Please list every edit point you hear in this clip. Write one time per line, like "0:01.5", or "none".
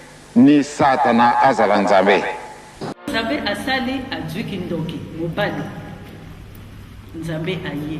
0:03.1

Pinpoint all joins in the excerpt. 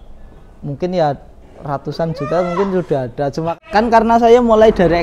0:03.5

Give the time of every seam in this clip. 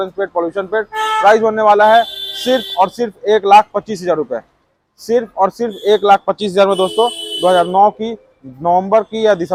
none

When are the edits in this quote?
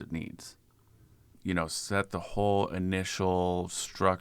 0:01.3

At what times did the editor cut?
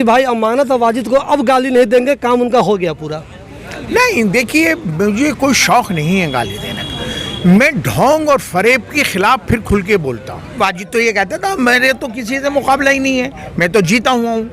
0:10.6

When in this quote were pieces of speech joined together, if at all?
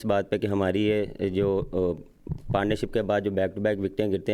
none

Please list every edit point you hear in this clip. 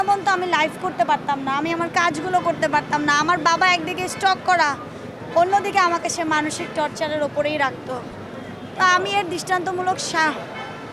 none

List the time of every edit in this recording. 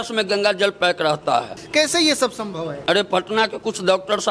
0:01.6
0:02.7

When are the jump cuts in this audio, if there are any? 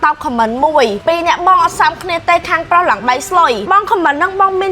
0:01.0
0:03.6

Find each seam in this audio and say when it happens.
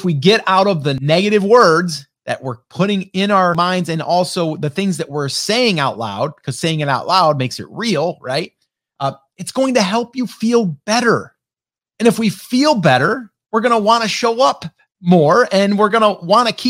0:00.9
0:03.5

